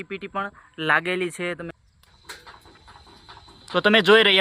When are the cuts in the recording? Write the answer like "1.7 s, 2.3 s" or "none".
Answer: 1.7 s